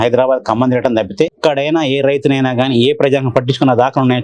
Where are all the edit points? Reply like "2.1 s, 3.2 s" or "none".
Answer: 1.4 s